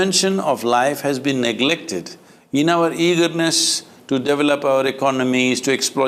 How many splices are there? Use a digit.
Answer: 0